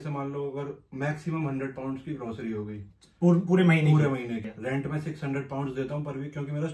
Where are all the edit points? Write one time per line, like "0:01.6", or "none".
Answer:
0:04.5